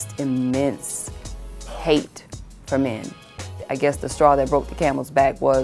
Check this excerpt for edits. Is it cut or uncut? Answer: cut